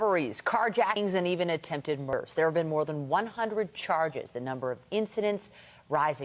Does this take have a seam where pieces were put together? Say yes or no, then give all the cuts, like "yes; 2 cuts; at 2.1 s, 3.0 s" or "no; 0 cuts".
yes; 1 cut; at 1.0 s